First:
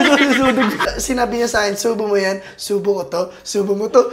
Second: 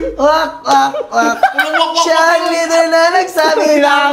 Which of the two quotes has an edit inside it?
first; 1 cut; at 1.0 s

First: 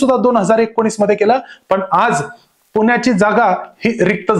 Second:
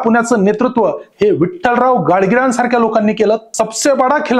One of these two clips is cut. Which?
second; 1 cut; at 3.5 s

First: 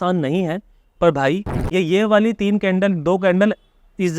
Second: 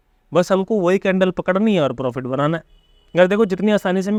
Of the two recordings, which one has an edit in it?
first; 1 cut; at 1.5 s

